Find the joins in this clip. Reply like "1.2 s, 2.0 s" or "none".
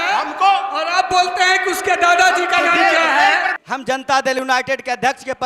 3.5 s